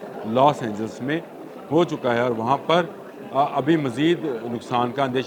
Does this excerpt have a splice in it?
no; 0 cuts

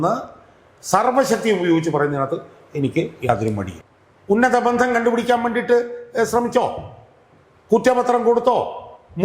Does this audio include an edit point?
yes; 1 cut; at 3.7 s

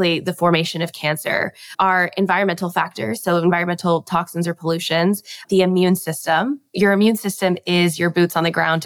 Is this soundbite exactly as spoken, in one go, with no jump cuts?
yes; 0 cuts

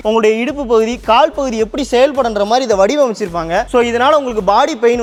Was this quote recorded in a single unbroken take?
yes; 0 cuts

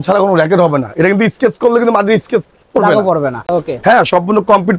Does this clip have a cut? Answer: yes; 1 cut; at 3.4 s

